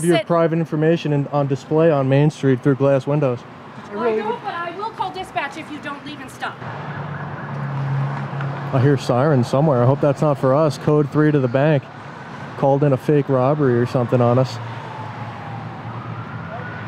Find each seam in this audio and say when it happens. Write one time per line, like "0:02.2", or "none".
0:03.8
0:06.7

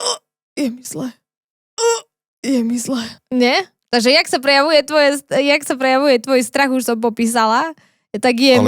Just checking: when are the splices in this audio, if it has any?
none

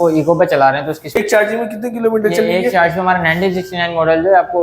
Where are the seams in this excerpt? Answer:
0:01.1

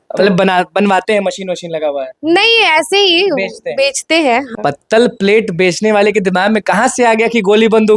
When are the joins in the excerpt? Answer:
0:04.5

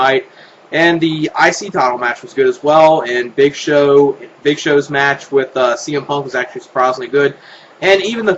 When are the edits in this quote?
none

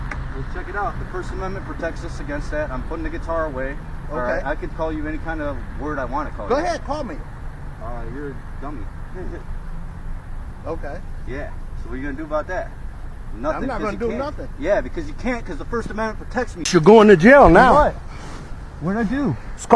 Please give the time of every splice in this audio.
0:16.7

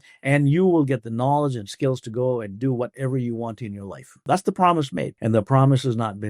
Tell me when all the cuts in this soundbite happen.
0:04.2
0:05.1

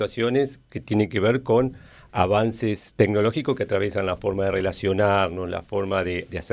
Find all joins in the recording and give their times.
none

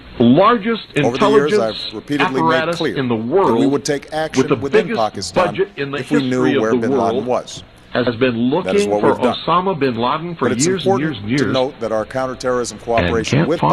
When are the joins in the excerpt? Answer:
0:05.5

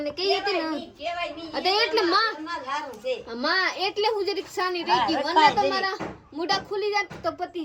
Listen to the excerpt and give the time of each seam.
none

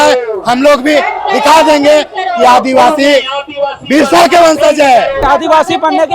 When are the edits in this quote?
0:05.2

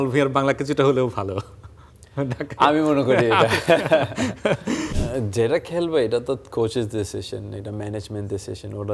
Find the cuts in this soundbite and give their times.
0:05.0

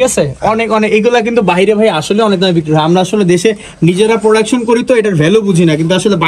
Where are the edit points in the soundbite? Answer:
none

